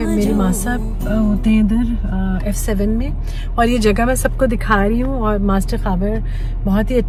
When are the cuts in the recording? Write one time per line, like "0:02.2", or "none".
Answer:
none